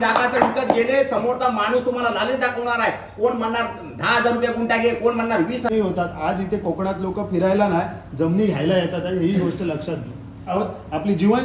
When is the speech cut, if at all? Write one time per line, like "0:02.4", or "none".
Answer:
0:05.7
0:10.5